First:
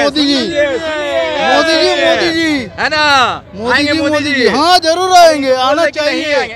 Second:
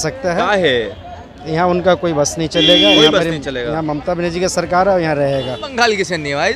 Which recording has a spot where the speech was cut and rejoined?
second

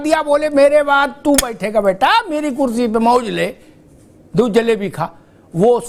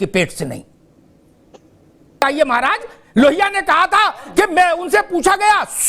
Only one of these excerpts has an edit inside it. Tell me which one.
second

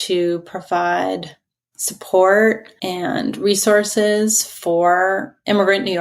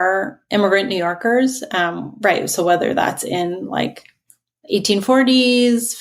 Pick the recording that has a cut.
first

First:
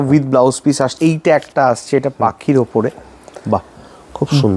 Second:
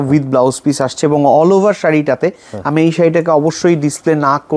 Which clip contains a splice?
first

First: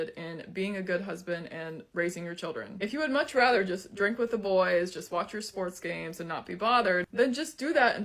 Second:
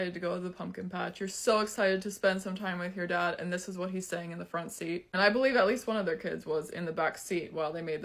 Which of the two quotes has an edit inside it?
first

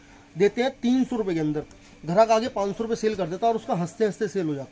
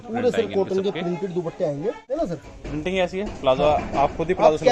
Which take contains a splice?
second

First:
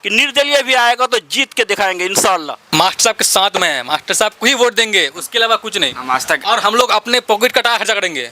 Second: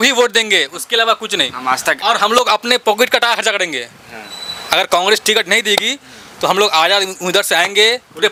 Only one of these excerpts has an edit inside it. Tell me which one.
first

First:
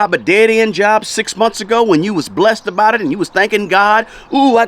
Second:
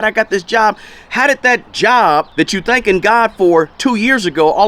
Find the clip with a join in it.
second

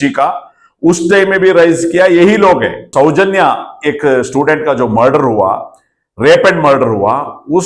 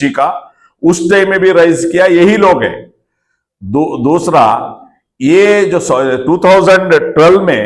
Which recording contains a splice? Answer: first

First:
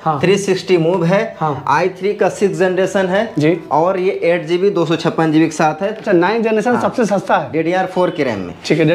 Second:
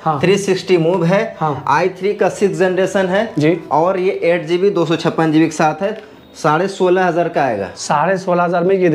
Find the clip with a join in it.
first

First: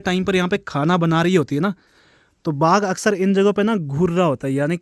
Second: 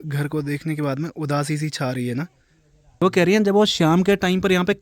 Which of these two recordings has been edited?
second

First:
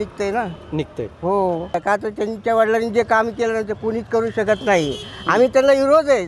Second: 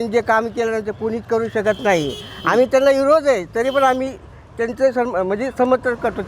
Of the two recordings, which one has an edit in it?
first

